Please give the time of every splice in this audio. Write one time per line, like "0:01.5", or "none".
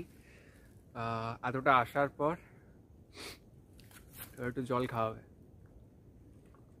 none